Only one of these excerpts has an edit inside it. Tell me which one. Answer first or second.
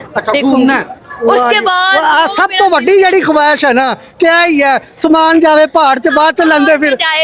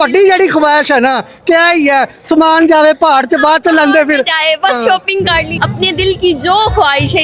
second